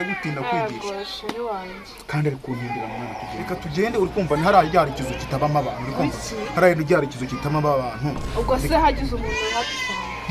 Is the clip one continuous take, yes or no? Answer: no